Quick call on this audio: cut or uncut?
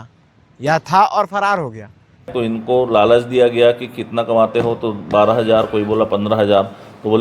cut